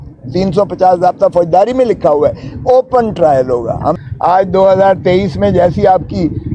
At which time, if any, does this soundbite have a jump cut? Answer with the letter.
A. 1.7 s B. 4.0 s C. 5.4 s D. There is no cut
B